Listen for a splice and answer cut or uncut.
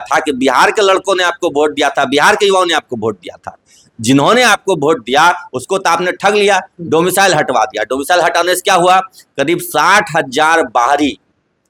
uncut